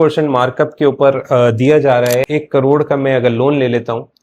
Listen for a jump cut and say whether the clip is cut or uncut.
cut